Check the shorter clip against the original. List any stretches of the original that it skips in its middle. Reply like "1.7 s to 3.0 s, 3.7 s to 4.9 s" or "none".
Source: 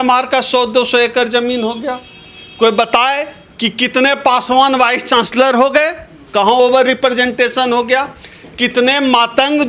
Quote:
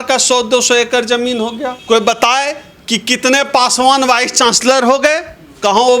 1.9 s to 2.4 s